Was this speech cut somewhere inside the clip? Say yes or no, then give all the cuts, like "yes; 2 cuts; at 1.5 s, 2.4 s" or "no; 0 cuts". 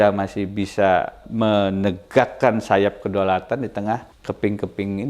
yes; 2 cuts; at 1.2 s, 4.1 s